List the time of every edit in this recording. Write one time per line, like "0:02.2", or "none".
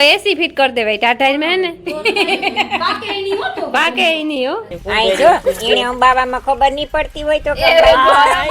0:04.7

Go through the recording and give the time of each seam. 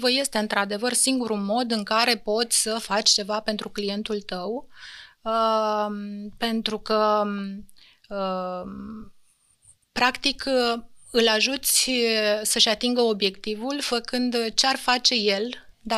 none

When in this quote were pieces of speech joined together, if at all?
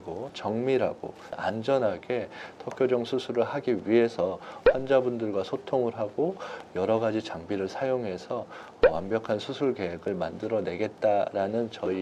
none

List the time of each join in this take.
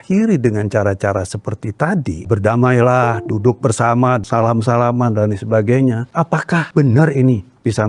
0:02.3
0:04.2
0:06.5

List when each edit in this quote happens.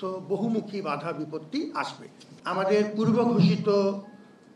0:02.3

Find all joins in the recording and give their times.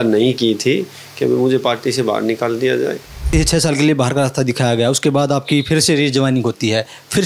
0:03.3

